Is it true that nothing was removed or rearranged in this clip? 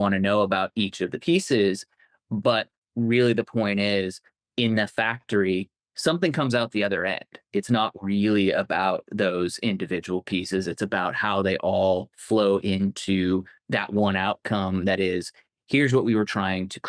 yes; 0 cuts

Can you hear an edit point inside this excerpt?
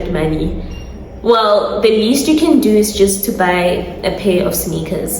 no; 0 cuts

